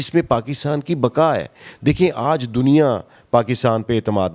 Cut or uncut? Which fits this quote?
uncut